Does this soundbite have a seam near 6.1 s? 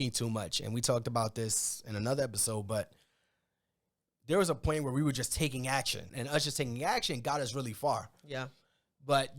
yes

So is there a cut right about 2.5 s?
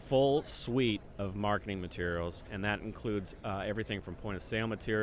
yes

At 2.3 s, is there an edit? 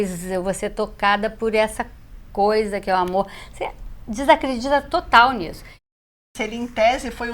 no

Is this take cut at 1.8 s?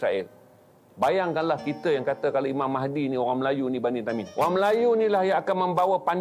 no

